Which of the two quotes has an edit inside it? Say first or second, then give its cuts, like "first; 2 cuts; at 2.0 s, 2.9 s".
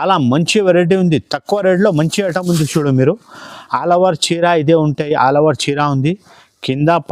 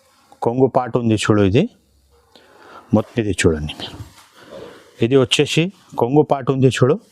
second; 1 cut; at 3.1 s